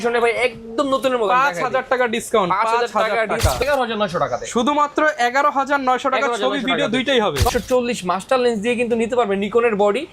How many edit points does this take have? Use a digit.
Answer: 2